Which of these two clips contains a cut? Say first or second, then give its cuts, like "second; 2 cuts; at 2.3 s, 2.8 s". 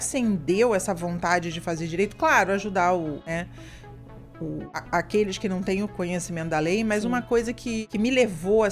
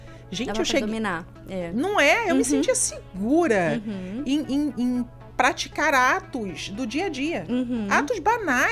first; 3 cuts; at 3.2 s, 4.7 s, 7.8 s